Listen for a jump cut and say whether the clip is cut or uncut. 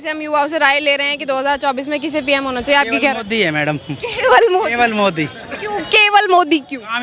uncut